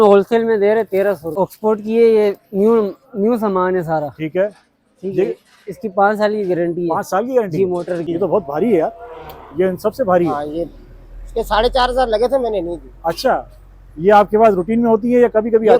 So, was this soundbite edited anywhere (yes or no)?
yes